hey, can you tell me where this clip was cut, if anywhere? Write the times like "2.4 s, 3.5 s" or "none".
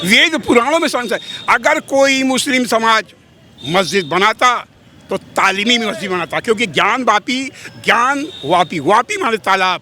none